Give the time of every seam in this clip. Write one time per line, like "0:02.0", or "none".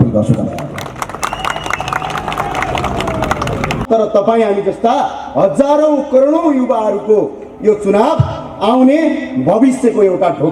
0:03.8